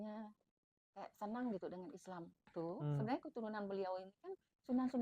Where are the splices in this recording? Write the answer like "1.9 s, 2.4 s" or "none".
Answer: 2.5 s